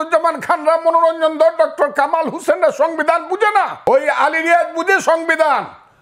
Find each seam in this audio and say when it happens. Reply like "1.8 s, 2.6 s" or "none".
3.7 s